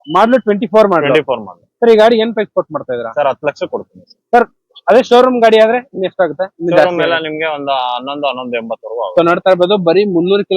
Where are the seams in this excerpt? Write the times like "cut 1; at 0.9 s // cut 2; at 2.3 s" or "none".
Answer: none